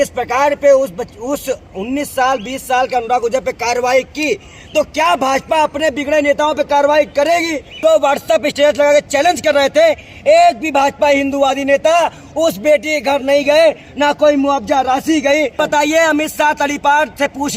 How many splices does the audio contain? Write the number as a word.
two